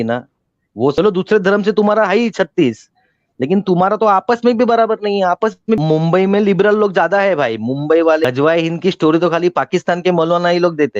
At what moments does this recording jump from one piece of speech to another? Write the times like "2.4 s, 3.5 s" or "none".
0.9 s, 5.8 s, 8.2 s